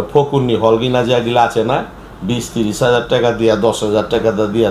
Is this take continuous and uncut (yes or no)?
yes